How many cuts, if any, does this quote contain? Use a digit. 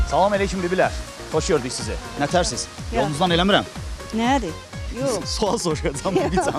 0